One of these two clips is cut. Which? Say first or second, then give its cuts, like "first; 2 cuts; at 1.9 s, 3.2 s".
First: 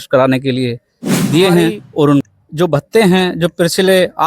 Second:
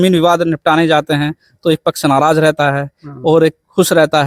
first; 1 cut; at 2.2 s